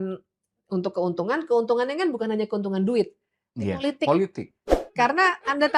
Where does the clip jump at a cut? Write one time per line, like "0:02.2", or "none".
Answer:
0:04.8